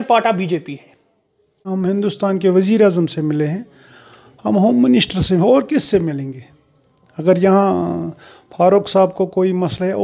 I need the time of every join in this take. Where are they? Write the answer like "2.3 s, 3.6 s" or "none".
none